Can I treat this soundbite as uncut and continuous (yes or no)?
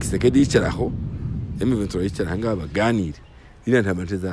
yes